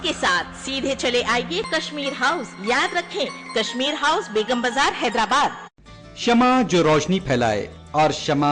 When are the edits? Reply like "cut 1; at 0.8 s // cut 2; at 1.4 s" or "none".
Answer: cut 1; at 5.9 s